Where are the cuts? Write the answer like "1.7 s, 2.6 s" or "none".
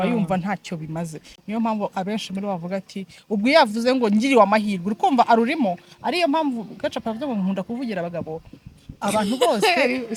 none